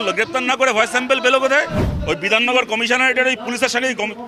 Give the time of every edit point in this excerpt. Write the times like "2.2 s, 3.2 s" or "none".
2.2 s